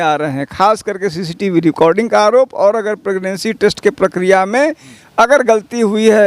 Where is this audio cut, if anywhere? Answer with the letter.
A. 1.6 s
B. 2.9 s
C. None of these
C